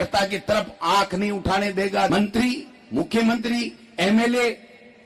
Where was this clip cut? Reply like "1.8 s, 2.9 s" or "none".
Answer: 2.1 s